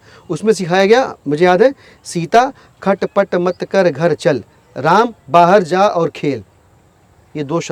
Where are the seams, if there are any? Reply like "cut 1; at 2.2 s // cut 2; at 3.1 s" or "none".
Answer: none